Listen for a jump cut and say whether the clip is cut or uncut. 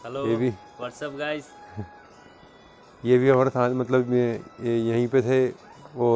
uncut